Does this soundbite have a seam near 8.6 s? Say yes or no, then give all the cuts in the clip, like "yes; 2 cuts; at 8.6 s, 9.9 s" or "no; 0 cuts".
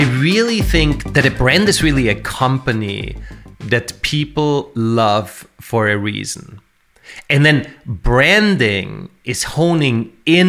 no; 1 cut; at 1.0 s